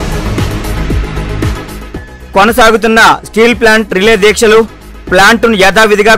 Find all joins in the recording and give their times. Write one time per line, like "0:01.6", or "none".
0:01.0